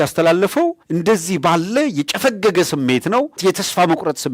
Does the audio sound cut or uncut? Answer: cut